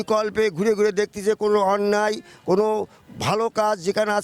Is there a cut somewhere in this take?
no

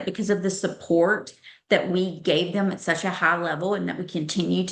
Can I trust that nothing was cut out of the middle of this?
yes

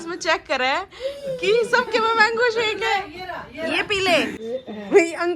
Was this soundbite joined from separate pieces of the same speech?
yes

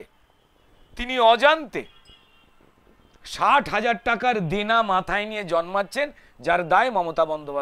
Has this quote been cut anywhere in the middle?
no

